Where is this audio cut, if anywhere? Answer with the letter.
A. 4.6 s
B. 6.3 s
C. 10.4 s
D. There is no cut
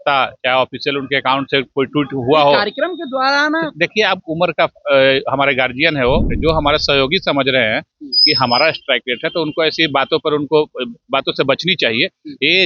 B